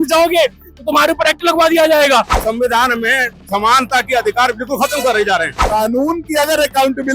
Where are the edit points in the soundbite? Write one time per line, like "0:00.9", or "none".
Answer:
0:02.3
0:05.6